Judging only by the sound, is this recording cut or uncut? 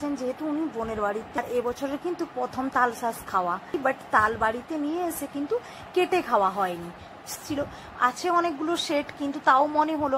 cut